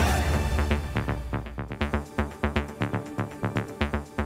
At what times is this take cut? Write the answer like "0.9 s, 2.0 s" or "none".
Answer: 1.7 s